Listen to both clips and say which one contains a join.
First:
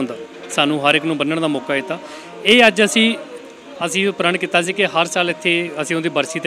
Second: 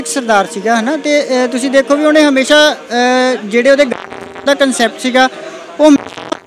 first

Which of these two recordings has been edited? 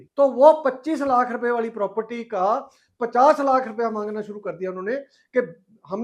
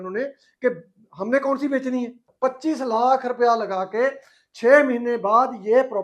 second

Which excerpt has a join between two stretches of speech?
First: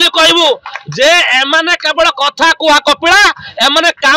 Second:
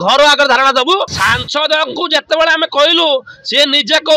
second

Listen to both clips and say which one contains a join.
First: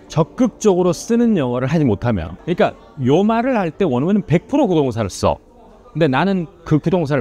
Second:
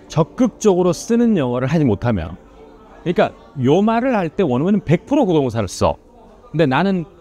first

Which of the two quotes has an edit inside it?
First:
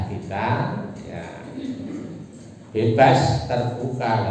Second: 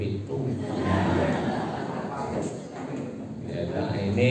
second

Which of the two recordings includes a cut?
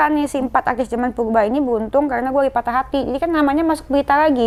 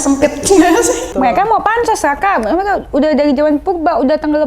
second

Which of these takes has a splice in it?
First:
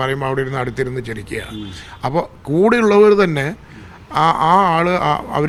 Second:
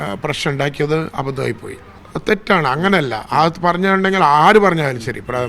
second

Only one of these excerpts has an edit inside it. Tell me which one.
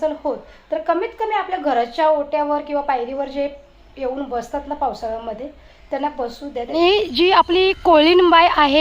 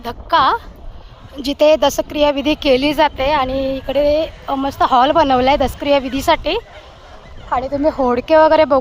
first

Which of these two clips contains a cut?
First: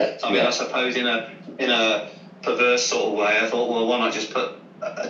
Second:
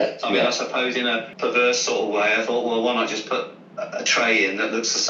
second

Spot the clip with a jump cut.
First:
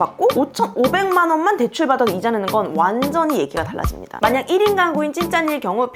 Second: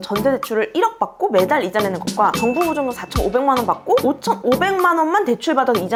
first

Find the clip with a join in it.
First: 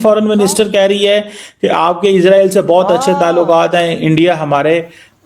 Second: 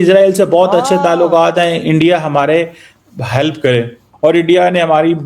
second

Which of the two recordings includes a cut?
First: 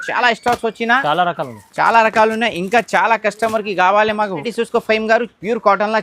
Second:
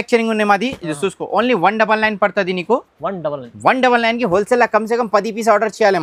first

